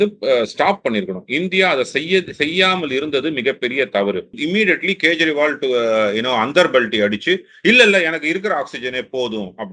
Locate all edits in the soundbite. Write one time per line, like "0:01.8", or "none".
0:04.4